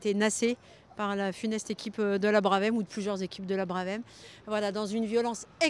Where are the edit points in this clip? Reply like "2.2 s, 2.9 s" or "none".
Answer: none